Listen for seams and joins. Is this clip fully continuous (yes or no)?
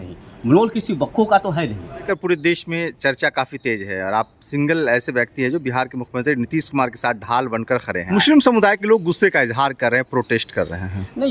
no